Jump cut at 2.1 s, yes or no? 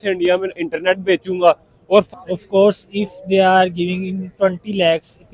yes